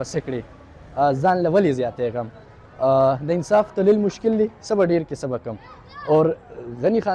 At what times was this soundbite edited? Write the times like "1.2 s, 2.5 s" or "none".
none